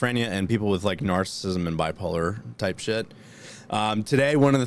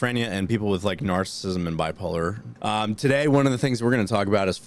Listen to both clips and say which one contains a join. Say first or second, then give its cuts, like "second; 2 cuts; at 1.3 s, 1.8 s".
second; 1 cut; at 2.5 s